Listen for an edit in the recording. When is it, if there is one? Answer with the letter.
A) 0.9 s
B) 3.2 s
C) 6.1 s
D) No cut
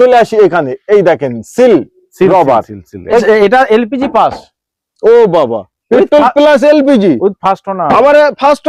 B